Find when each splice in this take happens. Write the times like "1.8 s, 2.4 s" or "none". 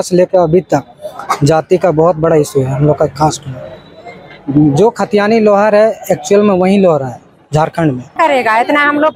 8.1 s